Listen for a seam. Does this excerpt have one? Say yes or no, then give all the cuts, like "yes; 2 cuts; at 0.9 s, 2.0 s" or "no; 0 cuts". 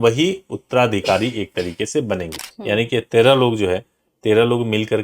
yes; 1 cut; at 2.3 s